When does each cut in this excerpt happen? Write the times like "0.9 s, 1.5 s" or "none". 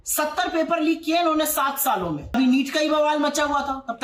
2.3 s